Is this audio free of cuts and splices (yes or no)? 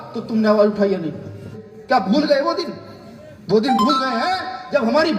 no